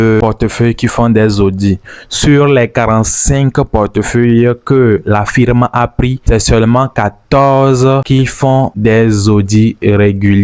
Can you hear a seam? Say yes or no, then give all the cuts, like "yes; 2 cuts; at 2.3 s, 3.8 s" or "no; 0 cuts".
no; 0 cuts